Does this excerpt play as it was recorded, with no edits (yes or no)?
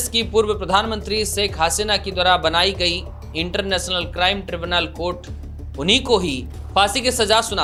yes